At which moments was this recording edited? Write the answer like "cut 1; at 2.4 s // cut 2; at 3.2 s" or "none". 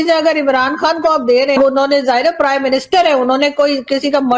cut 1; at 1.5 s